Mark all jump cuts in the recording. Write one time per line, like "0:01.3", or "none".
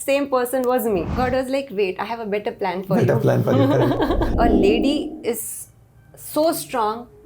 0:01.1
0:04.3